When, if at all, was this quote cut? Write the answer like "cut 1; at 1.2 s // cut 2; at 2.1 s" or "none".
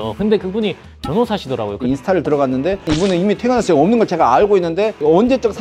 cut 1; at 1.8 s